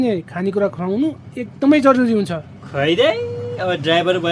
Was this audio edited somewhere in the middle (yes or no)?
yes